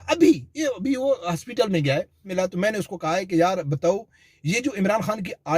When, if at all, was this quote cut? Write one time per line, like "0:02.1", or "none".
0:02.3